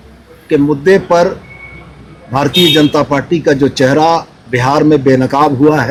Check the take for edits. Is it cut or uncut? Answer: uncut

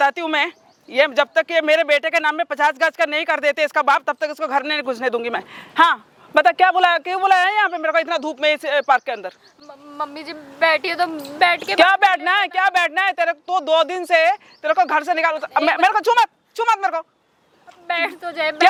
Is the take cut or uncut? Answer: uncut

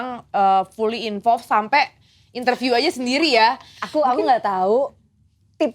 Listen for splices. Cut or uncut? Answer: cut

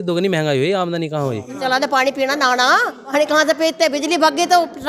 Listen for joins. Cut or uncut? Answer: cut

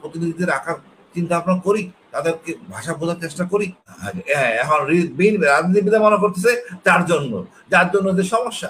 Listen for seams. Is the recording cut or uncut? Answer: cut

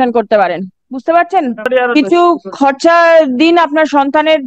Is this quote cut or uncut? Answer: cut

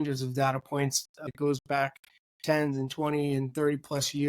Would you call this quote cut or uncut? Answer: cut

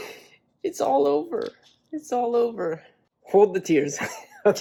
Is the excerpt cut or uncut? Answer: uncut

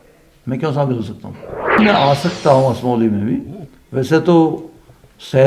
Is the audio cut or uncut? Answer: cut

